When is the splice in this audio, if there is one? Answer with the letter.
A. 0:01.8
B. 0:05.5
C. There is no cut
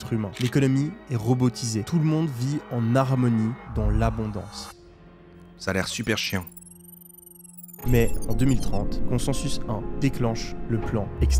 A